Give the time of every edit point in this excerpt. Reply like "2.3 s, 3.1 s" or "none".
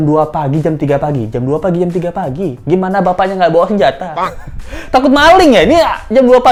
none